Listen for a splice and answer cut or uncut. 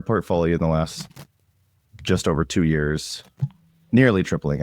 uncut